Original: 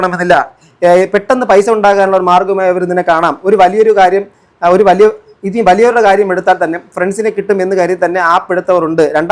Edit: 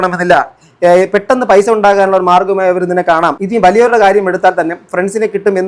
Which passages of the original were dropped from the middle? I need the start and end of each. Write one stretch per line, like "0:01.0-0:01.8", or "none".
0:03.4-0:05.4